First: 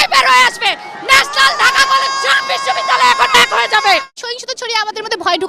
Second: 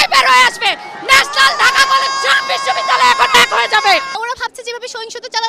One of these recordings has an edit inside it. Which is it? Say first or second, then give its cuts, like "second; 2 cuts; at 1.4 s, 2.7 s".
first; 1 cut; at 4.1 s